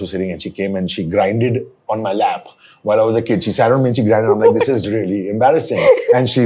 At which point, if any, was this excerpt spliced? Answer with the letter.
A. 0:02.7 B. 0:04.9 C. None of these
C